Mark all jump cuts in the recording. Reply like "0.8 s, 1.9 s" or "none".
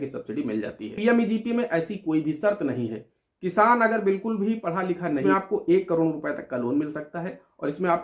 0.9 s, 5.3 s